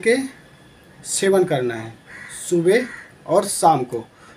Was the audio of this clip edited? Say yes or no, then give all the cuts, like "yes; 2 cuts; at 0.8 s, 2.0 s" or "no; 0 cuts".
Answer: no; 0 cuts